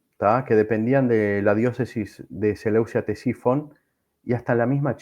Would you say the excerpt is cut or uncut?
uncut